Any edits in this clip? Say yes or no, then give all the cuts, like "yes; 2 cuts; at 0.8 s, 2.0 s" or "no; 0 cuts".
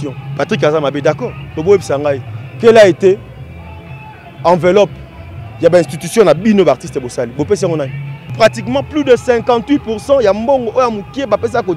yes; 1 cut; at 8.3 s